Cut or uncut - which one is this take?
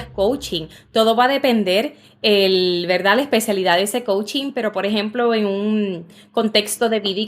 uncut